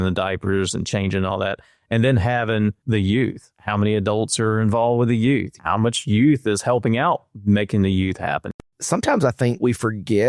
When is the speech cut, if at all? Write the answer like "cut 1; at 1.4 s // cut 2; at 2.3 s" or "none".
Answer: cut 1; at 2.8 s // cut 2; at 3.5 s // cut 3; at 5.5 s // cut 4; at 8.5 s